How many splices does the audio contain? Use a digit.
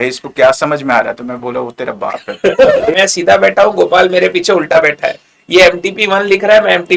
1